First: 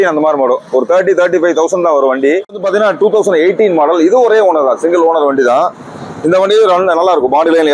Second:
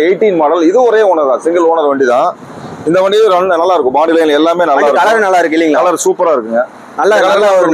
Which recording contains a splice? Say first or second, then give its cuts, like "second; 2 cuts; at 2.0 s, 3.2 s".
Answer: first; 1 cut; at 2.4 s